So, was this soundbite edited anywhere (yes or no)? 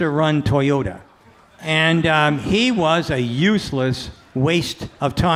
no